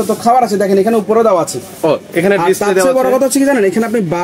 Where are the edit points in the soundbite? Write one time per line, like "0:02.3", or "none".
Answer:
none